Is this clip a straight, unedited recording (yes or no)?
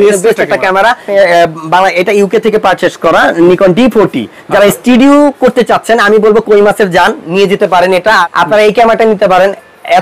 no